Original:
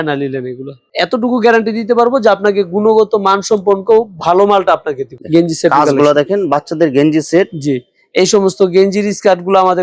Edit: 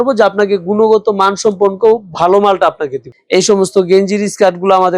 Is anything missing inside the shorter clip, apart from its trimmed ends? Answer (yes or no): yes